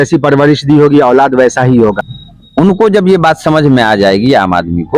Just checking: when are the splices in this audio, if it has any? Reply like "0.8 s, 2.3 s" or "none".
2.1 s